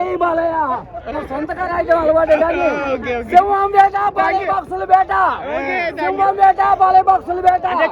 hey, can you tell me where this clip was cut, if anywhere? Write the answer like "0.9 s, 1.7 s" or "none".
1.1 s